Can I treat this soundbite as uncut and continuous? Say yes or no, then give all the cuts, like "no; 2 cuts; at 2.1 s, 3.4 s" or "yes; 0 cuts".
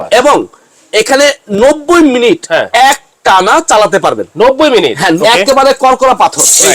no; 1 cut; at 5.1 s